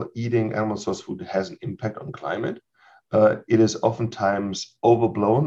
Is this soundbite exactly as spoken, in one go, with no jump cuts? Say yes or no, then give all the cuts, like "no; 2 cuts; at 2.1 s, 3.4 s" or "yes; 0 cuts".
yes; 0 cuts